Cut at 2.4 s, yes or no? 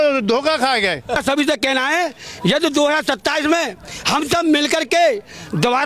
no